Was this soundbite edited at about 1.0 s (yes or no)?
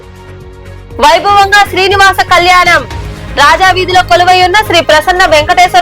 yes